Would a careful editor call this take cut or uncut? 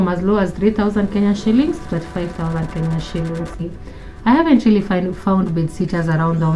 cut